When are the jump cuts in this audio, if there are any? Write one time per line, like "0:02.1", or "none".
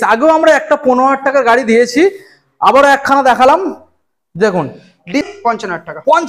0:05.3